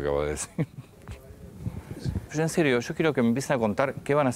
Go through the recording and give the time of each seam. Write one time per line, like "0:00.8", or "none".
0:02.3